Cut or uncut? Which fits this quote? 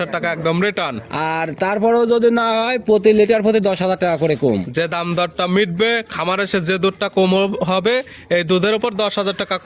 uncut